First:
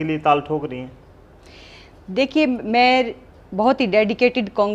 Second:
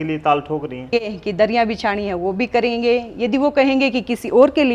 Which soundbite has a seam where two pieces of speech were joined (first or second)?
second